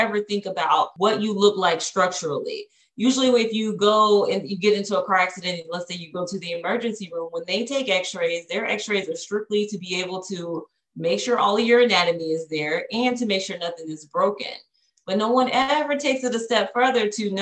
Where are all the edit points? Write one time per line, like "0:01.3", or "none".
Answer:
0:00.9